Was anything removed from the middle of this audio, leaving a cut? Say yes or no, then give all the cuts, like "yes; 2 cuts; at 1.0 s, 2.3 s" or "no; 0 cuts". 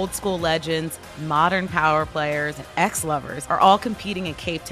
yes; 1 cut; at 3.0 s